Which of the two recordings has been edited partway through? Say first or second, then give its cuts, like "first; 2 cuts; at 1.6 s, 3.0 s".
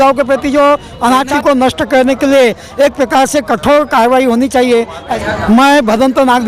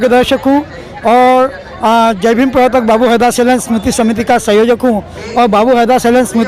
first; 2 cuts; at 1.3 s, 5.1 s